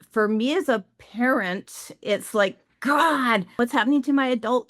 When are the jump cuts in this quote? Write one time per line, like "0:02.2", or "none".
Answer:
0:03.6